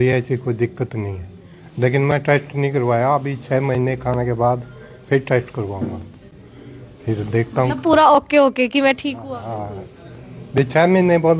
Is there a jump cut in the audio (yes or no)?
no